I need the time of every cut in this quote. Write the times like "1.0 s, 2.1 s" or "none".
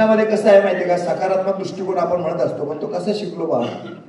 none